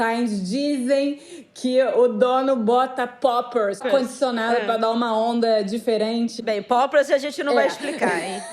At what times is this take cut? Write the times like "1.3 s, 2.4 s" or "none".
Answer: 3.8 s, 6.4 s